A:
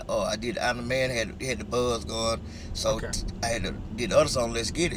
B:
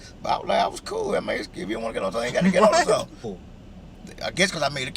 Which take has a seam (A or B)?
B